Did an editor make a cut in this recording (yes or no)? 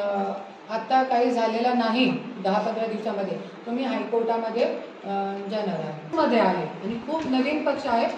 yes